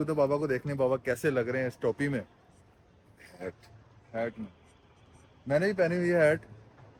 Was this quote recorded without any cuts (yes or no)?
yes